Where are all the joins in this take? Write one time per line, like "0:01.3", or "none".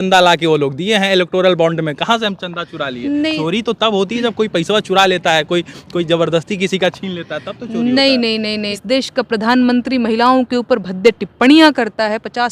0:08.7

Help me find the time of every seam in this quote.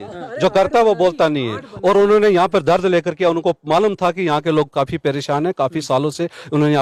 none

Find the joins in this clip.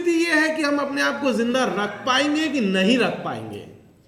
none

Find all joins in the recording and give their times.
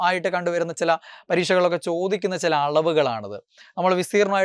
none

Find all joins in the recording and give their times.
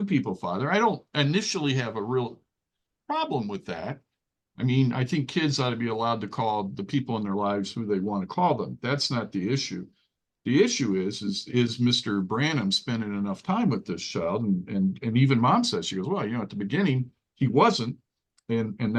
none

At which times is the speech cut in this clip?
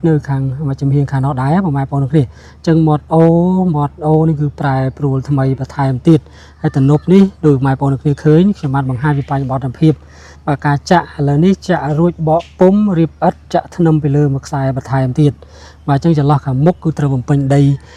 none

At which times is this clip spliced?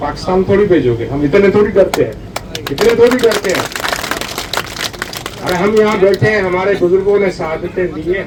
none

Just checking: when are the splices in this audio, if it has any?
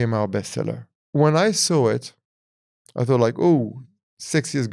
0:00.9

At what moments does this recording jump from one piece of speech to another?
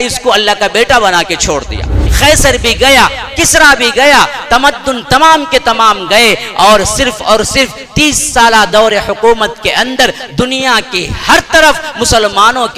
0:02.0

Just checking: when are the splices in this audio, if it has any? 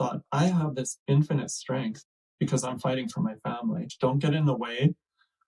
0:03.9

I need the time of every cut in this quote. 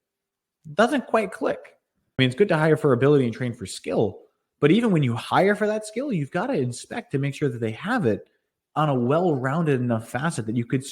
0:02.1

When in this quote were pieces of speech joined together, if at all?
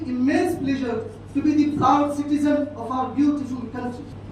none

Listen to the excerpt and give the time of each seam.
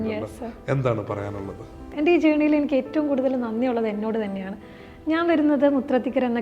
0:01.8

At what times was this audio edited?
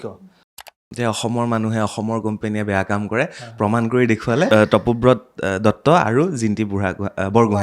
0:00.9
0:04.5

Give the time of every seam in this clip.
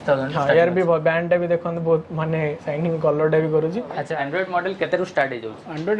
0:04.0

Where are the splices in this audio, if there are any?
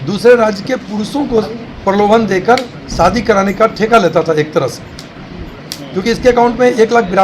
none

